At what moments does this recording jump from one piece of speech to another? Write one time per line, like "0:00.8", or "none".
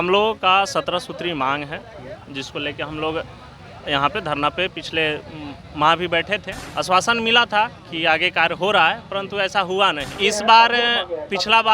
0:06.6
0:10.1

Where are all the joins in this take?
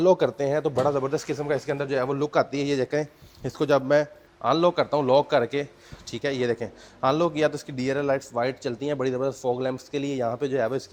none

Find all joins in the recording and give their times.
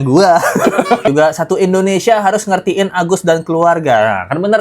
0:01.1

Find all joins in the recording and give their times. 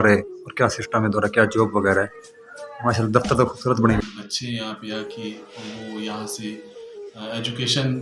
0:04.0

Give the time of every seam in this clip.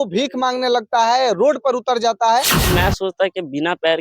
0:02.6

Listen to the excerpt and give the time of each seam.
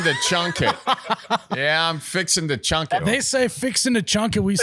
0:03.0

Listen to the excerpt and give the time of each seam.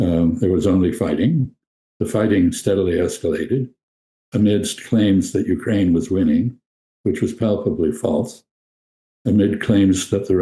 none

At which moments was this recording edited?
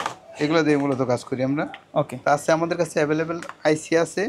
none

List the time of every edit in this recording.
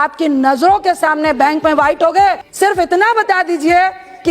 0:02.5

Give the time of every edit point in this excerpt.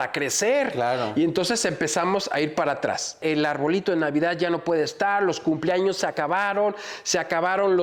0:03.2

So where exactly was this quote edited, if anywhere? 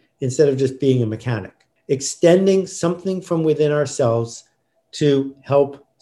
0:01.7

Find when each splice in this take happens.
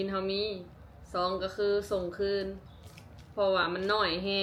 none

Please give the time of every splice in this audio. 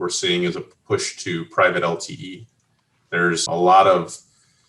0:03.4

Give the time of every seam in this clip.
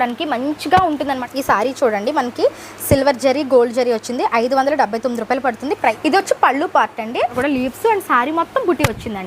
0:01.2
0:06.0
0:07.3

